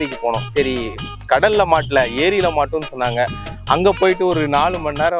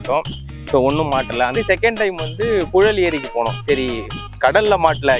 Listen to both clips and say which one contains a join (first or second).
second